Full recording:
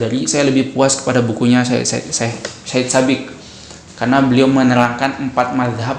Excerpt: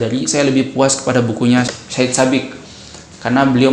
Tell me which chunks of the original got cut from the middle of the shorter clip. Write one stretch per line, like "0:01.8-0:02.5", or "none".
0:01.7-0:02.4